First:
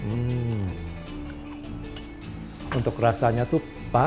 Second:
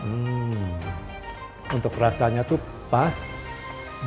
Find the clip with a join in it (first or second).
second